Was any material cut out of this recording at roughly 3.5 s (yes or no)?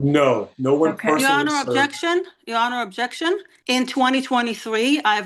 yes